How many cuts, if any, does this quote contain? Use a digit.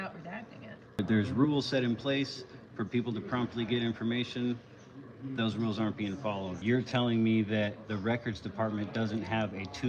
2